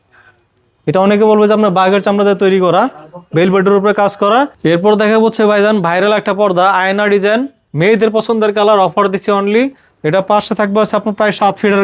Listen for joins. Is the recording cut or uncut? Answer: cut